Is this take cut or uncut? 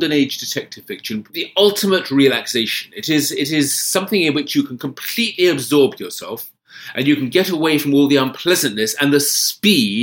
cut